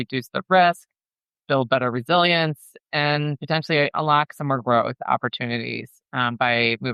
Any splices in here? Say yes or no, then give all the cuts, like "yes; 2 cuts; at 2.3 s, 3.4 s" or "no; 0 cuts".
no; 0 cuts